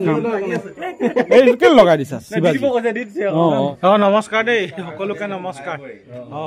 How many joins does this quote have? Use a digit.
1